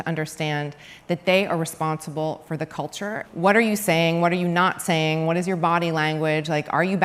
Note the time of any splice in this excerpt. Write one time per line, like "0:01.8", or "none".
0:03.2

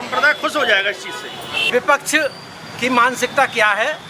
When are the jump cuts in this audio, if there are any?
0:01.7

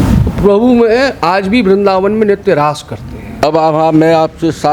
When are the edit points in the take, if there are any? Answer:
0:03.4

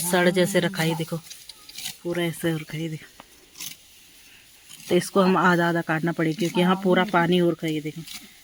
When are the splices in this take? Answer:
none

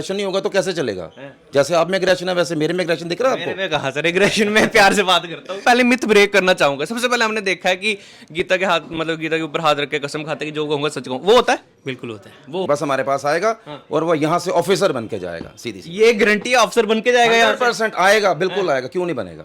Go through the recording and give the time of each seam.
0:05.6
0:12.7

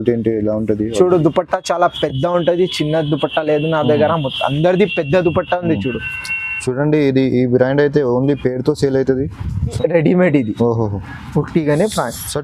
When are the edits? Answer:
0:09.8

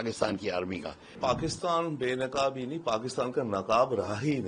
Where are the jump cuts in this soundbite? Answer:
0:01.2

